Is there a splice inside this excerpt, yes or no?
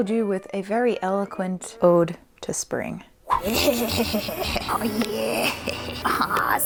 no